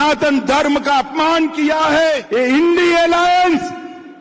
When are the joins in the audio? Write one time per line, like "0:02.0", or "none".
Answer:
0:02.2